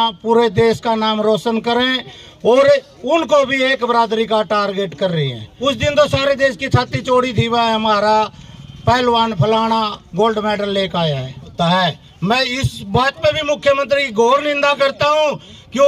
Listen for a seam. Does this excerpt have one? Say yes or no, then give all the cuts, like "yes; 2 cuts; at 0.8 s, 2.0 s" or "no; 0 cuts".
yes; 2 cuts; at 5.4 s, 11.5 s